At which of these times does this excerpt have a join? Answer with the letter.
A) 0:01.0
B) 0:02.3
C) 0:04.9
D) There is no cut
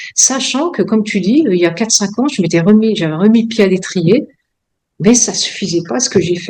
D